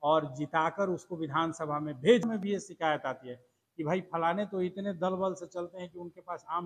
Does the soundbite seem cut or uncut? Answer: cut